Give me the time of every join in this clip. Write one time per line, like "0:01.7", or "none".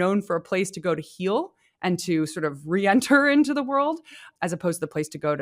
0:04.3